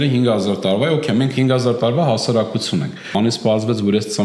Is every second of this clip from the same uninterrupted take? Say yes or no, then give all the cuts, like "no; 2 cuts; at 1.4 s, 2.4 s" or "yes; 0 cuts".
no; 1 cut; at 3.1 s